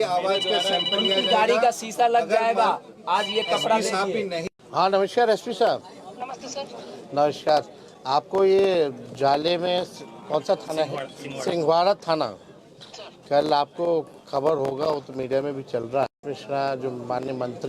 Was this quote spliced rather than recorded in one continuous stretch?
yes; 2 cuts; at 4.6 s, 16.2 s

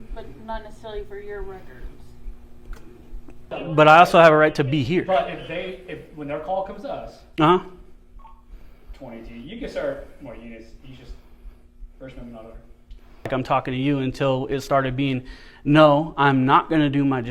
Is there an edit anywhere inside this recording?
yes; 2 cuts; at 3.6 s, 13.3 s

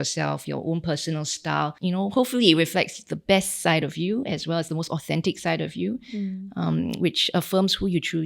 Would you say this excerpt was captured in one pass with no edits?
yes; 0 cuts

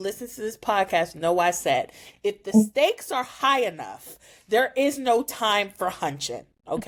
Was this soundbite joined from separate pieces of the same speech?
no; 0 cuts

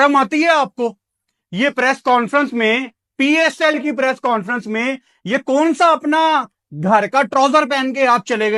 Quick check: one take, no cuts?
yes; 0 cuts

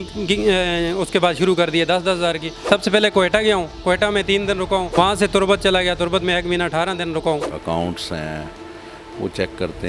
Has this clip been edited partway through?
yes; 3 cuts; at 2.5 s, 4.9 s, 7.5 s

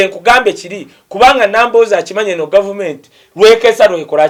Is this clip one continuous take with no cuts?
yes; 0 cuts

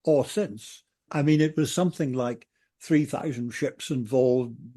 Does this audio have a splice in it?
yes; 1 cut; at 1.1 s

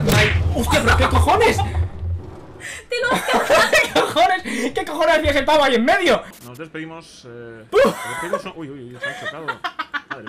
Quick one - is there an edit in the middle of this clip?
no; 0 cuts

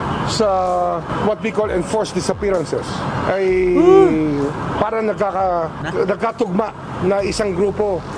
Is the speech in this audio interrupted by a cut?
no; 0 cuts

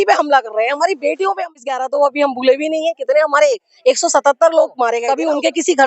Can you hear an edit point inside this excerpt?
yes; 2 cuts; at 1.5 s, 5.0 s

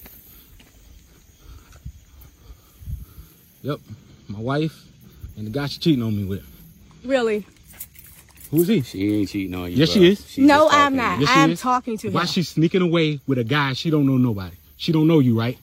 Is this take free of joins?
yes; 0 cuts

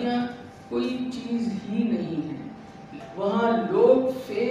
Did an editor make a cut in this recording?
yes; 1 cut; at 3.0 s

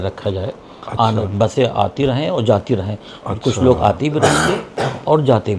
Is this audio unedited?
yes; 0 cuts

